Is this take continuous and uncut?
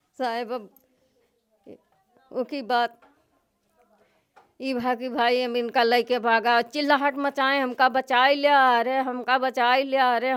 yes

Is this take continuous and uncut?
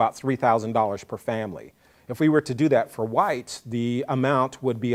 yes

